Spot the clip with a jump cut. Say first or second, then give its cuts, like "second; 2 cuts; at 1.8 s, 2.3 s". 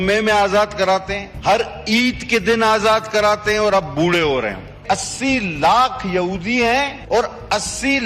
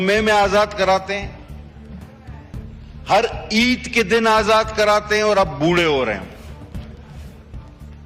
first; 3 cuts; at 1.2 s, 4.8 s, 7.0 s